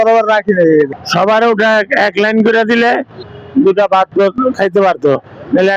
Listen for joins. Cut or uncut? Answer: cut